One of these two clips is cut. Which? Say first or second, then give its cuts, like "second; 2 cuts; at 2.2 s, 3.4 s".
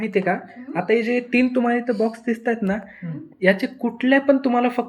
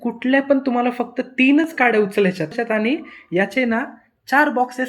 second; 1 cut; at 2.5 s